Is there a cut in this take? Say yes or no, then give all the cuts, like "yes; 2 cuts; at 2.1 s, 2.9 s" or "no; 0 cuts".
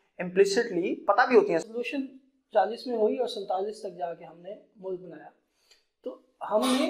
yes; 1 cut; at 1.7 s